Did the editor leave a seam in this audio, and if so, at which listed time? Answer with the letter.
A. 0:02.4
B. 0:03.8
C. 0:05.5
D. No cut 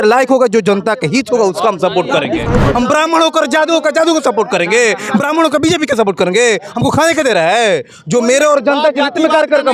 A